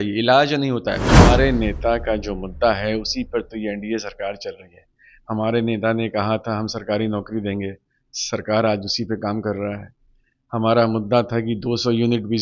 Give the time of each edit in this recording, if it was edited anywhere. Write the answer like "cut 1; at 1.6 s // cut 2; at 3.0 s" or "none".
cut 1; at 1.1 s